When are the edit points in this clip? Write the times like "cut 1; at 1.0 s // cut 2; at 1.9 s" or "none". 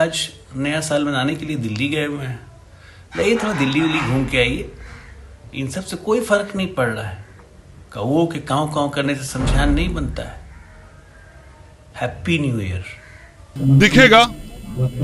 cut 1; at 13.5 s